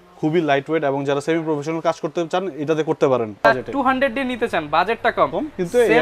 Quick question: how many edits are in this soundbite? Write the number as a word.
one